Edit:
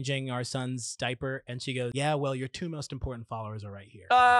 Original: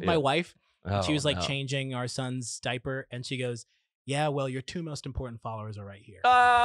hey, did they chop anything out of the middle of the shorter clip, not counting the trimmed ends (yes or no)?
yes